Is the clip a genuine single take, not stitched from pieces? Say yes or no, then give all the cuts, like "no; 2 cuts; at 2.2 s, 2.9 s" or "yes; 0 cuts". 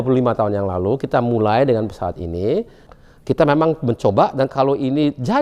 no; 1 cut; at 2.8 s